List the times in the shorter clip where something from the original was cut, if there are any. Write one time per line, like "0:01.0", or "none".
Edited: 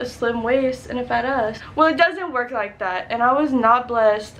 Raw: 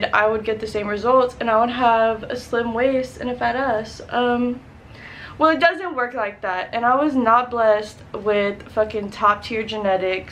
0:01.6